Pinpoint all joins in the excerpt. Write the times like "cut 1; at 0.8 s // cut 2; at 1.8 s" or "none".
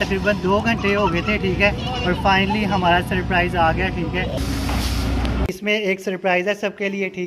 cut 1; at 4.4 s // cut 2; at 5.4 s